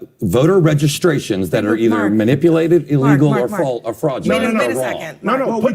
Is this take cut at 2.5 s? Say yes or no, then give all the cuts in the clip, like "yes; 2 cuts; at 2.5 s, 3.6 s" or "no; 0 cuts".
no; 0 cuts